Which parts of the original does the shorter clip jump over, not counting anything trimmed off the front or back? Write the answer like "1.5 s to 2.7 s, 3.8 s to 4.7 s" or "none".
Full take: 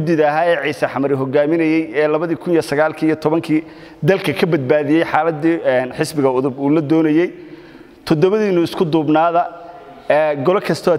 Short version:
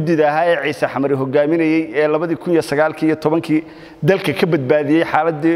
none